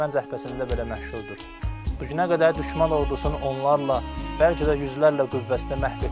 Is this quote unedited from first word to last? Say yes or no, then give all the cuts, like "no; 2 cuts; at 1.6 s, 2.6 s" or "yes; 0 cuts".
yes; 0 cuts